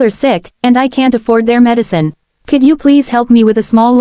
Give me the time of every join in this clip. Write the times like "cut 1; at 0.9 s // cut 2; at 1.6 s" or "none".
none